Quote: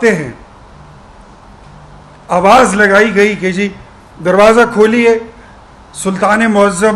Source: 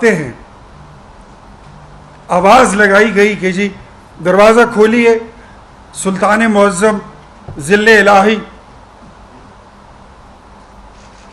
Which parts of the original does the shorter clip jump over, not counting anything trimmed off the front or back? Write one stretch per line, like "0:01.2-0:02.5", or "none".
none